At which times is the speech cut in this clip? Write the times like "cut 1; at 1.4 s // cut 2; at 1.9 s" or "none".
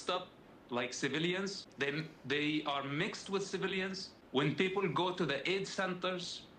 cut 1; at 1.6 s // cut 2; at 4.1 s